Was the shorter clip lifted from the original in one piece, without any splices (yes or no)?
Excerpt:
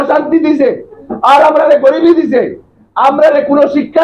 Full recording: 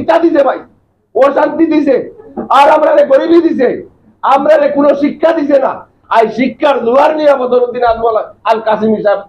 yes